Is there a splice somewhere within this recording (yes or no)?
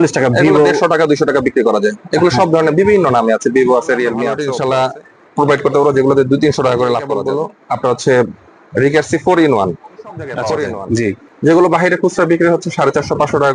yes